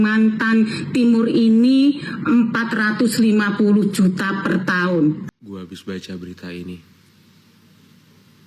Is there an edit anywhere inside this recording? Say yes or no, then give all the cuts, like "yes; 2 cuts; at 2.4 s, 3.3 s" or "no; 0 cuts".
yes; 1 cut; at 5.2 s